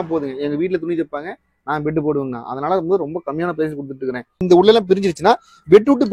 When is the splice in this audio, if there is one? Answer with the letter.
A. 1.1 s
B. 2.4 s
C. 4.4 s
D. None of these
C